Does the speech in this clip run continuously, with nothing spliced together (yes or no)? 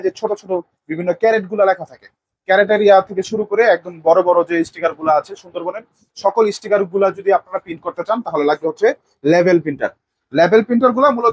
yes